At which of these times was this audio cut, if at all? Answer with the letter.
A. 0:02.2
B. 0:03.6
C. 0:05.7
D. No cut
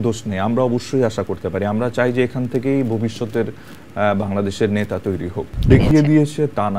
C